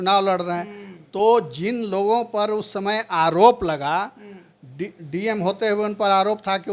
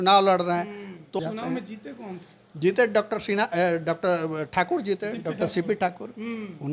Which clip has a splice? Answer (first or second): second